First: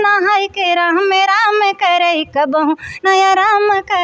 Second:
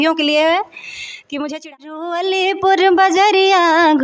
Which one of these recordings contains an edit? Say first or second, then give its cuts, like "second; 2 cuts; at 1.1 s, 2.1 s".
second; 1 cut; at 1.9 s